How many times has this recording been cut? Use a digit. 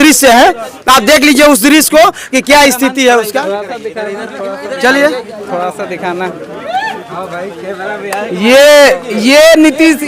0